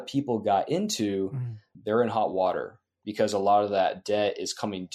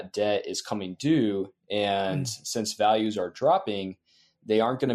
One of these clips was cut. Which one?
first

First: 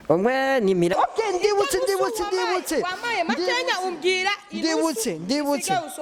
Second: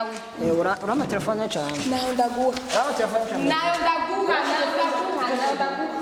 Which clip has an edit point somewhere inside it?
first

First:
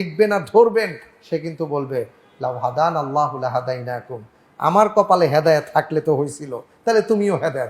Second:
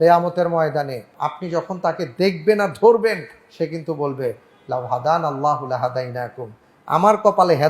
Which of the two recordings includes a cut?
second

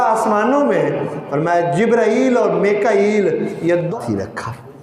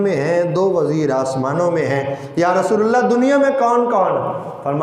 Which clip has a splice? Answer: first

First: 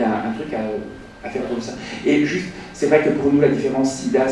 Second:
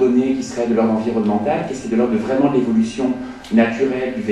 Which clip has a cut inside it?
first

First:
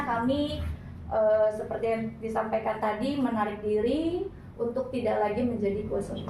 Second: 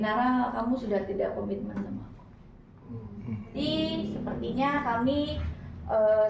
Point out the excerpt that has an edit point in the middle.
second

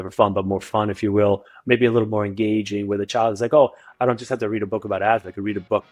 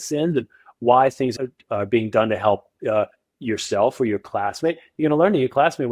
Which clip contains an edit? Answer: second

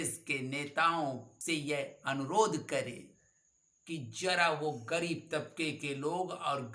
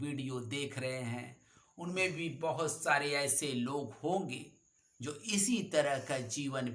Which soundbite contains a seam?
first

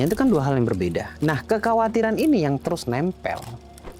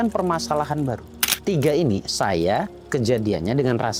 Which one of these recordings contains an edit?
second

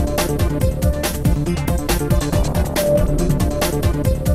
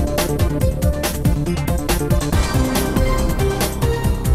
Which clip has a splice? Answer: second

